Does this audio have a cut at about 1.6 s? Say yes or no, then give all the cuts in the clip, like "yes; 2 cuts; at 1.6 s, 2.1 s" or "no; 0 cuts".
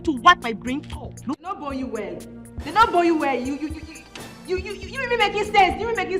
yes; 1 cut; at 1.6 s